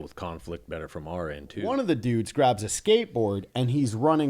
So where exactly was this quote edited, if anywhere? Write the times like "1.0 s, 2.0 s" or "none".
1.6 s